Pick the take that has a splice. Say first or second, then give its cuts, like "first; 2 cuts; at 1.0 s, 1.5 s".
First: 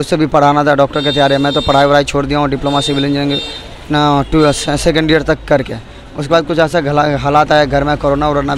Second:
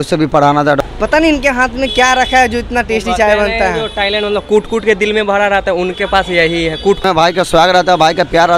second; 2 cuts; at 0.8 s, 7.0 s